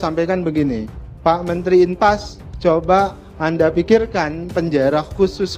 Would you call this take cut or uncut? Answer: uncut